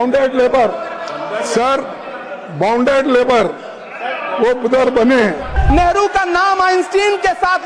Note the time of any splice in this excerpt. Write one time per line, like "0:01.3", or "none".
0:05.6